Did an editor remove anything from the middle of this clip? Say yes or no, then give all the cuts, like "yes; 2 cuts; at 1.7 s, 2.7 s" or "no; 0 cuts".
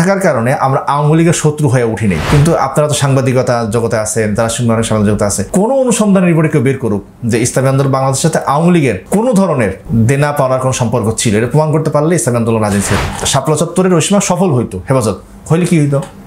yes; 5 cuts; at 2.2 s, 5.4 s, 9.0 s, 9.8 s, 12.9 s